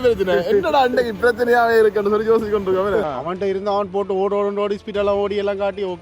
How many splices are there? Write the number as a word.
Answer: one